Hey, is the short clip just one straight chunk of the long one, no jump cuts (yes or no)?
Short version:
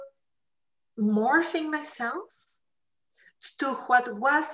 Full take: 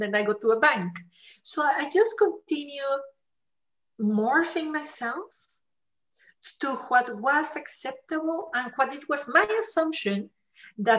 yes